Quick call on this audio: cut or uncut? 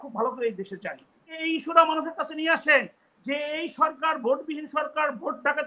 cut